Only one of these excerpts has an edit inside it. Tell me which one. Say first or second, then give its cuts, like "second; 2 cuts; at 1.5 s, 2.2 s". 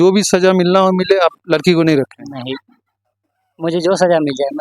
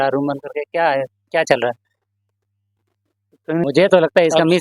second; 1 cut; at 3.6 s